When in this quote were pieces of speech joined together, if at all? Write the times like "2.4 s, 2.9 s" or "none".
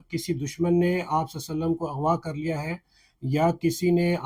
none